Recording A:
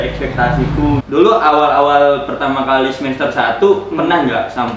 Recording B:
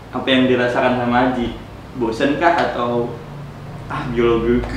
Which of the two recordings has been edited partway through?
A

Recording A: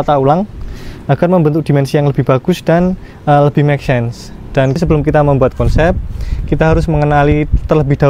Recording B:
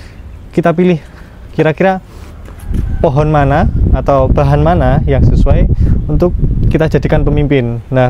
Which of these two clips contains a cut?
A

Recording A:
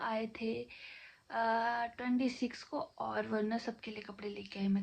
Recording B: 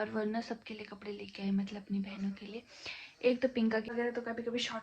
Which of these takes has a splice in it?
B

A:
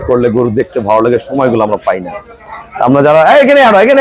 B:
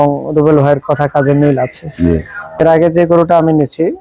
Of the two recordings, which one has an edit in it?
B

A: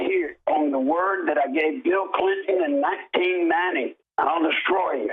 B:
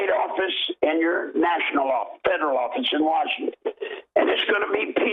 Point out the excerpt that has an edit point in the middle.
A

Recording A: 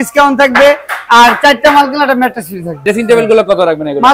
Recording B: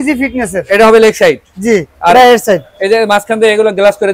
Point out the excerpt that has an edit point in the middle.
A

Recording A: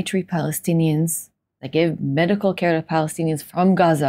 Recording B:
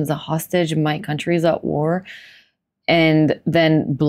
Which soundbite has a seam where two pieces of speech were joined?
A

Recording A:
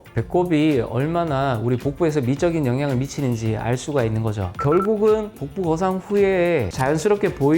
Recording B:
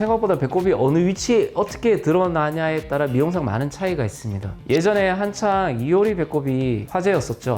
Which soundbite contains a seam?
A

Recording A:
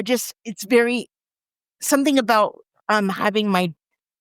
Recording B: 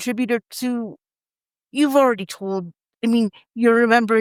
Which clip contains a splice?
A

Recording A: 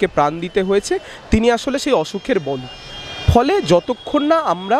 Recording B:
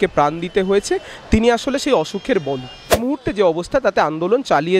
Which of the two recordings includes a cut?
B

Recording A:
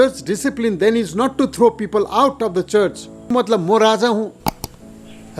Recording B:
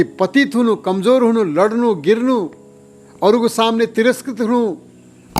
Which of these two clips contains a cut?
A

